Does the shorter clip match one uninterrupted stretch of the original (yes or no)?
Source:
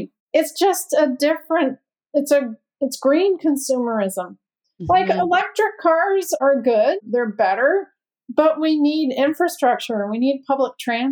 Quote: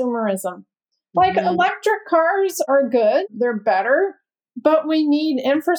yes